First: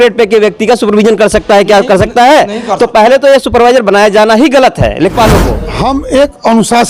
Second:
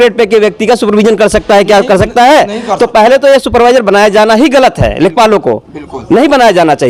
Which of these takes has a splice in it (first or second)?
first